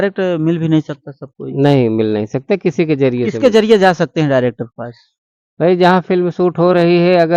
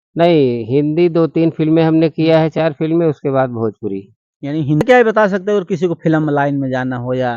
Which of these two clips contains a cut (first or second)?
second